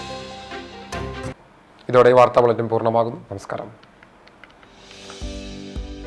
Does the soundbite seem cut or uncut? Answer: uncut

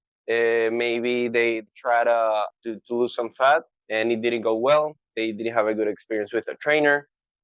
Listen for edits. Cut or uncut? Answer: uncut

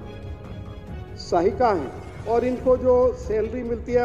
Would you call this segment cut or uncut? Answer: cut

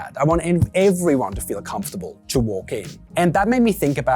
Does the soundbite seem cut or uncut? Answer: cut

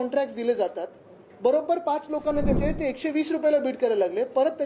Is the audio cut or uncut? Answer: cut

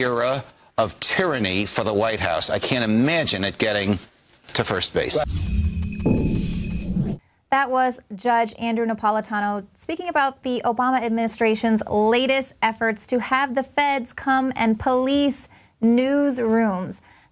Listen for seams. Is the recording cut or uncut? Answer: uncut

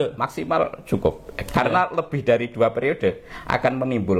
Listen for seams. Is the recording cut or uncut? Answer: uncut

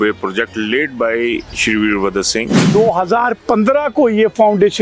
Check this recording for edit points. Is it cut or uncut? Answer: cut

